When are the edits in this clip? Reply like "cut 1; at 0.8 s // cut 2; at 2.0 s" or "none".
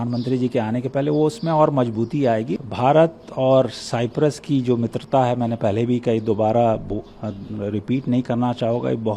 cut 1; at 2.6 s